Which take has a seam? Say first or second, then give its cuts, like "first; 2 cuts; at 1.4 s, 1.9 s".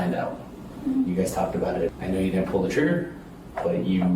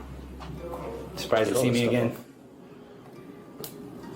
first; 1 cut; at 2.0 s